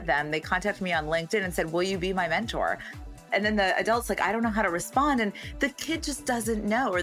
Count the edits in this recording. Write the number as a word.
one